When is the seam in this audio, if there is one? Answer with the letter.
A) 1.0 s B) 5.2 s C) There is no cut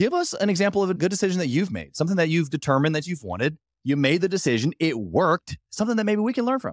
A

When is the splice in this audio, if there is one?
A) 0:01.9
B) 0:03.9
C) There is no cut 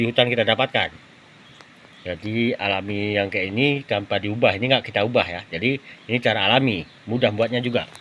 C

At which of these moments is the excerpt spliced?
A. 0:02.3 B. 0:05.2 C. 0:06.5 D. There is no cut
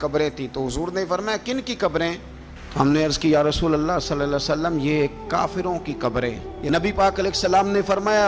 C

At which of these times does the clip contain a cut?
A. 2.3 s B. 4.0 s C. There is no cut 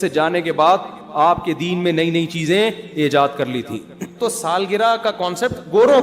B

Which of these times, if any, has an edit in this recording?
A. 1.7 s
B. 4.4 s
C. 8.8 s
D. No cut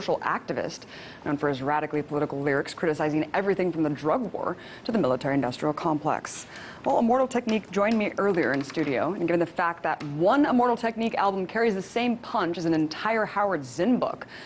C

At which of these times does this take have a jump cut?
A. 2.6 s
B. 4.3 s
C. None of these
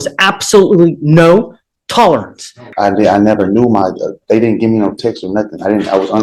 A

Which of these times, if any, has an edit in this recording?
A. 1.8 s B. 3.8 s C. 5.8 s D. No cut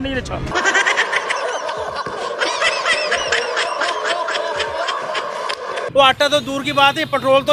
C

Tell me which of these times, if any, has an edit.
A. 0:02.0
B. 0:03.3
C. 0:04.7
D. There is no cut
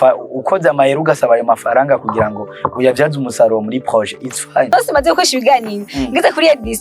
C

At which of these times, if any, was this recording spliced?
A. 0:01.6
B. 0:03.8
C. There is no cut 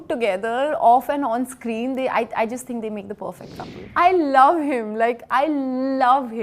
B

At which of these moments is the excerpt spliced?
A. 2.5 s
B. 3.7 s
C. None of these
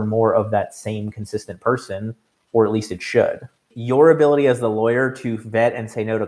B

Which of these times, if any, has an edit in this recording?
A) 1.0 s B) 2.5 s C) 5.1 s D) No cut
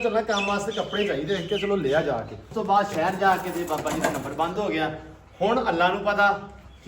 B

